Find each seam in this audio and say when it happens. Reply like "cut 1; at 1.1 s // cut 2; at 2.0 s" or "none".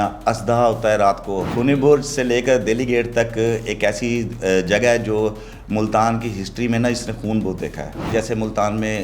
cut 1; at 1.5 s // cut 2; at 8.1 s